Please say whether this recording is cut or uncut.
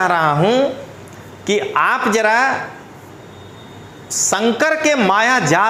uncut